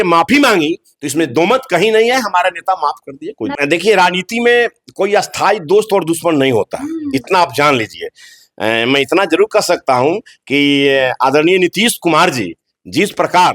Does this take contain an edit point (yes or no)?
yes